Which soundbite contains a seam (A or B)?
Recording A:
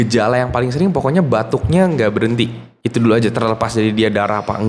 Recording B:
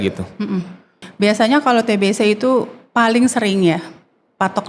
B